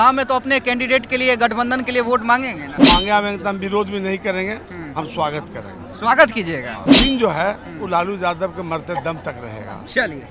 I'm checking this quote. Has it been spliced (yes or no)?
yes